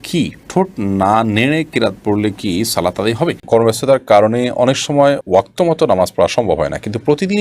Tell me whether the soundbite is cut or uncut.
cut